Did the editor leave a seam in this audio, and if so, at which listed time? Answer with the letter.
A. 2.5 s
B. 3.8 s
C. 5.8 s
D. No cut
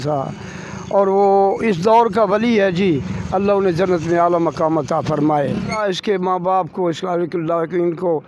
C